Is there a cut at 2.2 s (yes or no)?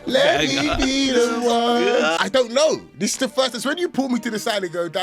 yes